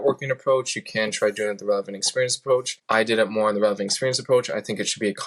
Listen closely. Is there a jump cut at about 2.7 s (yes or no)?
yes